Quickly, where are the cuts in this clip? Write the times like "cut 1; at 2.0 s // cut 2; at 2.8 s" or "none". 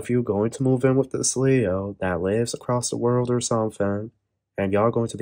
none